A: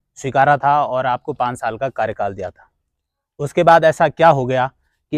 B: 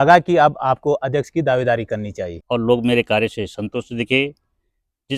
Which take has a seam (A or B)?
B